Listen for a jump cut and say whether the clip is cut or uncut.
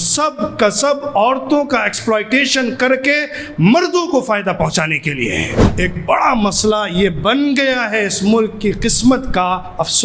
cut